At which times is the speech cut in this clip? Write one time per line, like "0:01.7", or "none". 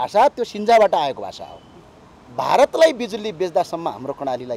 0:02.2